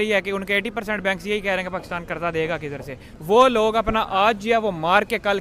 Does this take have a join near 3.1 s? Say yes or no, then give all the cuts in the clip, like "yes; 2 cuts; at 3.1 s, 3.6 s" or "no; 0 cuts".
yes; 1 cut; at 3.1 s